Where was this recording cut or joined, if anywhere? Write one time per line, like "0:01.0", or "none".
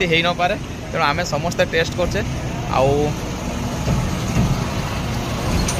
none